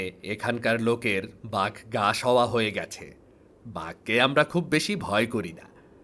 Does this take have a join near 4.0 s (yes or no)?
no